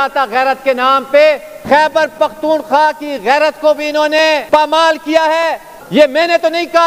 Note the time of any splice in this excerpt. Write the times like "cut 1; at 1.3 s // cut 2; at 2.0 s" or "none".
cut 1; at 1.5 s // cut 2; at 4.4 s // cut 3; at 5.7 s

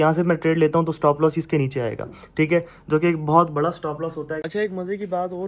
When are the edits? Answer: cut 1; at 4.5 s

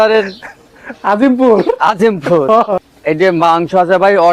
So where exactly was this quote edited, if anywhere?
cut 1; at 2.7 s

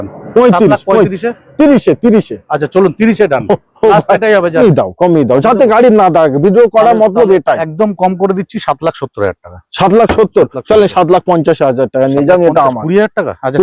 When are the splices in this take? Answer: cut 1; at 4.6 s

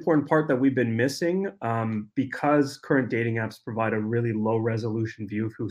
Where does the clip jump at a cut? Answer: none

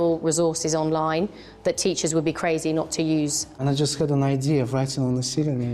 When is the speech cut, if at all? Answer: cut 1; at 3.6 s

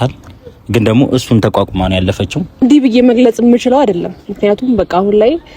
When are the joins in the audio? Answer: cut 1; at 2.6 s

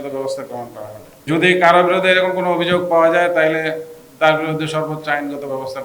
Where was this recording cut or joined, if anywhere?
cut 1; at 1.1 s

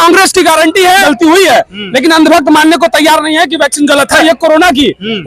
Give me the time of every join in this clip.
cut 1; at 1.0 s // cut 2; at 4.2 s

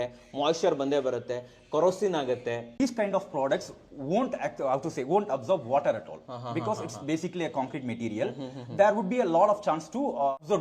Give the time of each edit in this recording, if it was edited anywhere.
cut 1; at 2.7 s

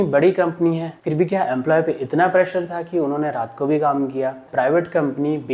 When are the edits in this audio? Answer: cut 1; at 0.9 s // cut 2; at 4.4 s

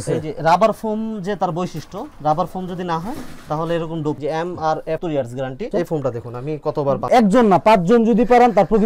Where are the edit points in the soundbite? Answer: none

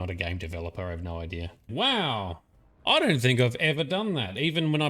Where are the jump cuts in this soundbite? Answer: cut 1; at 1.7 s

